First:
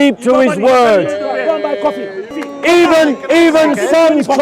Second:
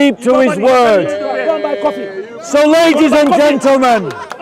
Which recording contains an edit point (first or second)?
first